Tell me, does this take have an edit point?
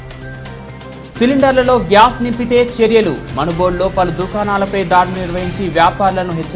yes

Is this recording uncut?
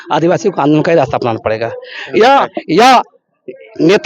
yes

